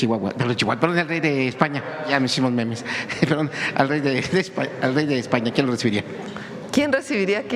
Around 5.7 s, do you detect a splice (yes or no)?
no